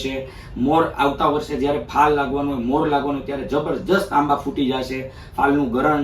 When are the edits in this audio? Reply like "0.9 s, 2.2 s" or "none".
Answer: none